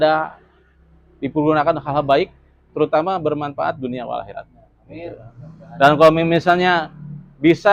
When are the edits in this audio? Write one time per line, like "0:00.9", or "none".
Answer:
none